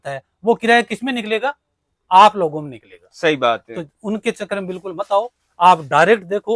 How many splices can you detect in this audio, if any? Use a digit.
0